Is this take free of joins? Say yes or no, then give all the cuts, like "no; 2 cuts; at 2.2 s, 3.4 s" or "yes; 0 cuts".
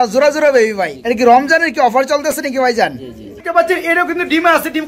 no; 2 cuts; at 0.9 s, 3.4 s